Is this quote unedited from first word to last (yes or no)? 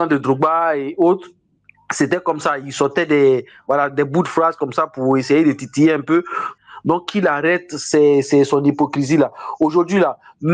no